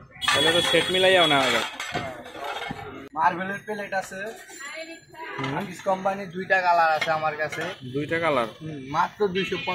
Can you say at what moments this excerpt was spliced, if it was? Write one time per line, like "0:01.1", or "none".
0:03.0